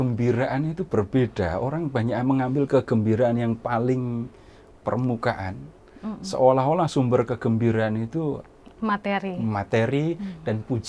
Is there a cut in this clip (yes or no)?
no